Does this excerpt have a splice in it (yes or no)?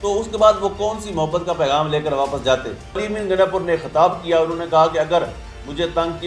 yes